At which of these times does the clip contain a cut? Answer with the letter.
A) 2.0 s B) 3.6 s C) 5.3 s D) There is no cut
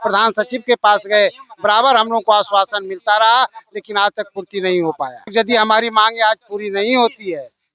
C